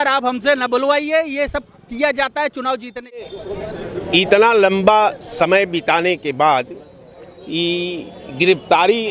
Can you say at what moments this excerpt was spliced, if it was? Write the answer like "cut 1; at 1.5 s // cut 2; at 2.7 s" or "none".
cut 1; at 3.3 s